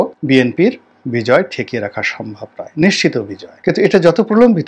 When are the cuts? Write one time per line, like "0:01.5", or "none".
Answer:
none